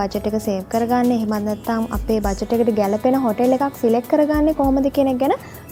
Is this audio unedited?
yes; 0 cuts

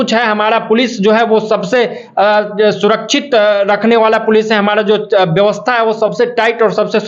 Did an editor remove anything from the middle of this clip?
no; 0 cuts

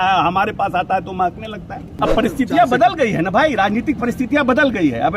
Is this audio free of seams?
no; 1 cut; at 1.9 s

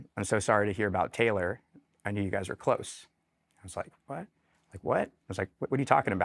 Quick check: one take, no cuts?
yes; 0 cuts

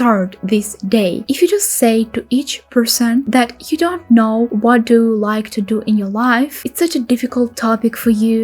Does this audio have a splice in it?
yes; 2 cuts; at 1.2 s, 6.6 s

